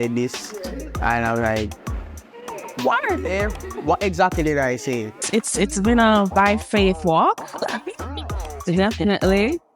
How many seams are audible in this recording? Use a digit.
1